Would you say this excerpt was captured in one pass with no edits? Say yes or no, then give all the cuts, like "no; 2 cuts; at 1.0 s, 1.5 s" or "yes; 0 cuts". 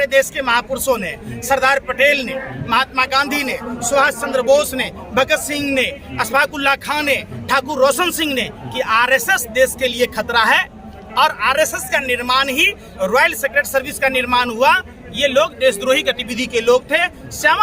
yes; 0 cuts